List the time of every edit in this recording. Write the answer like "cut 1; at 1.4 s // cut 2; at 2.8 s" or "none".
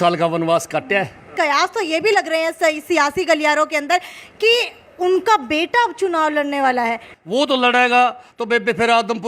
cut 1; at 1.3 s // cut 2; at 7.1 s

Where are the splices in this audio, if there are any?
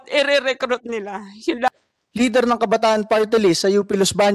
cut 1; at 1.8 s

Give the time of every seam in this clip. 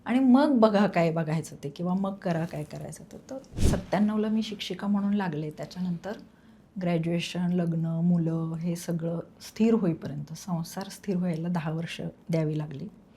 cut 1; at 3.6 s

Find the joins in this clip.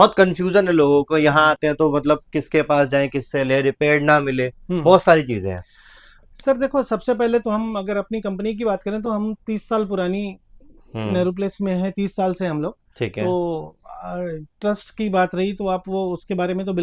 none

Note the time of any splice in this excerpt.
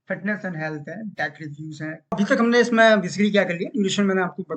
cut 1; at 2.1 s

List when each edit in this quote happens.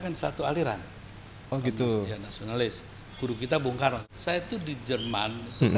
cut 1; at 4.1 s

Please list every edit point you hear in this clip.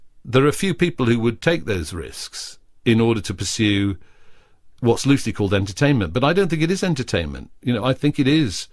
cut 1; at 1.0 s

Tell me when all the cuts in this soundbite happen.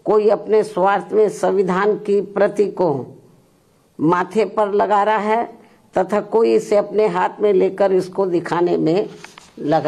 none

